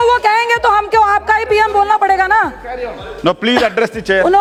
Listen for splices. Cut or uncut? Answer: uncut